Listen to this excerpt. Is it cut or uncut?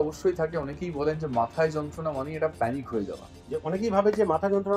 cut